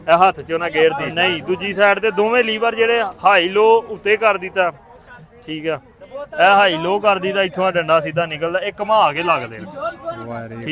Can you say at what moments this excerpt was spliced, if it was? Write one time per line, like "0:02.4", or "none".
0:01.1